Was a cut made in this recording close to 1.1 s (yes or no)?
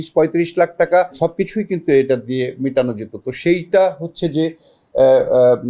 yes